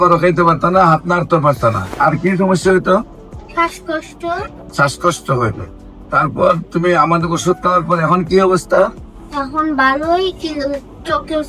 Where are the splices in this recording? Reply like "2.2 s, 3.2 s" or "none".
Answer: 1.9 s, 4.6 s